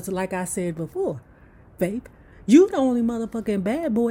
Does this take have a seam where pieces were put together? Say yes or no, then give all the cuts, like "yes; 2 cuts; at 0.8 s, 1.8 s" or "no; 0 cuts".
no; 0 cuts